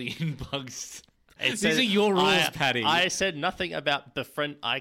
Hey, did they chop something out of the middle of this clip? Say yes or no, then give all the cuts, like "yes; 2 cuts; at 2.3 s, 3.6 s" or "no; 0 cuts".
yes; 1 cut; at 1.3 s